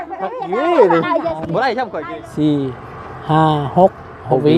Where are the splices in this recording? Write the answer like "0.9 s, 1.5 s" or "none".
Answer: 1.9 s